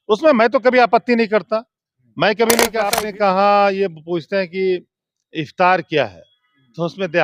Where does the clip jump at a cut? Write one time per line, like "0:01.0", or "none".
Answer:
0:02.9